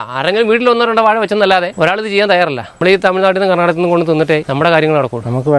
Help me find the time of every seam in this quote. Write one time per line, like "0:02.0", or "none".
0:01.7
0:02.7
0:04.5